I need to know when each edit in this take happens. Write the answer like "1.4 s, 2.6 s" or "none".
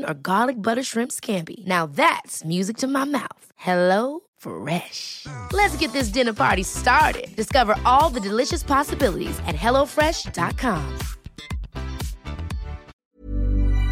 13.0 s